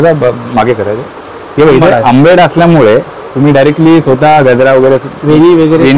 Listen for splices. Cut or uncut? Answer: uncut